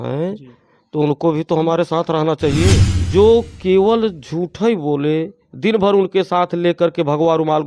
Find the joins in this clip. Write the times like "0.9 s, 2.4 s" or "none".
2.9 s